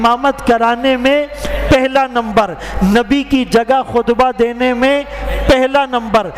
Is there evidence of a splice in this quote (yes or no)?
no